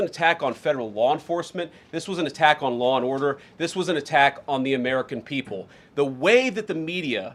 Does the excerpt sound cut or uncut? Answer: uncut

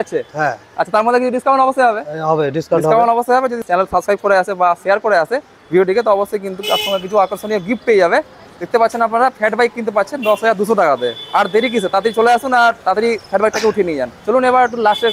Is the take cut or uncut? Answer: uncut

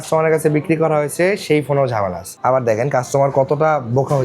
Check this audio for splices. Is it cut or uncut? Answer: cut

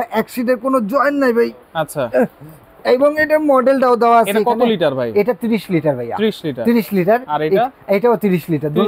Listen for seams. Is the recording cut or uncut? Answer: uncut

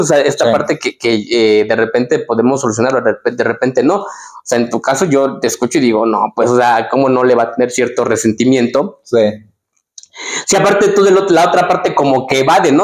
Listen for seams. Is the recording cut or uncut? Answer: uncut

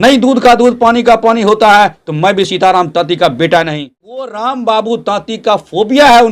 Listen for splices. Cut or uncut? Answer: cut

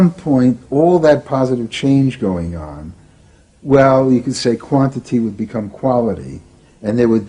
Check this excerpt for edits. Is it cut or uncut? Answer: uncut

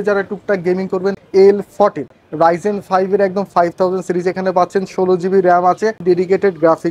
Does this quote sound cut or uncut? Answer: cut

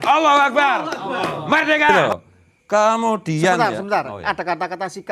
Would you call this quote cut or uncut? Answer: cut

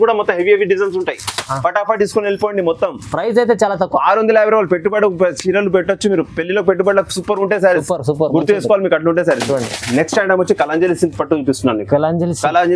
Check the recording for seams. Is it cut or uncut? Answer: uncut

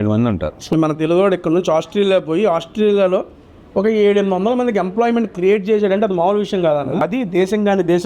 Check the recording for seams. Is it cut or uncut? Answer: cut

